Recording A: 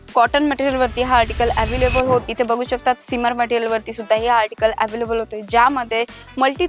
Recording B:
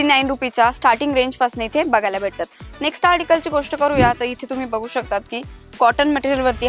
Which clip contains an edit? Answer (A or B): A